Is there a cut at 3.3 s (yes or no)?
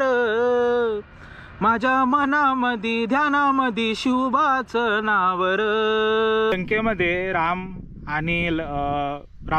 no